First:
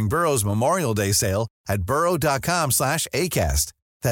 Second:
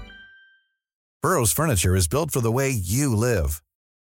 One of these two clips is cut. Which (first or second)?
second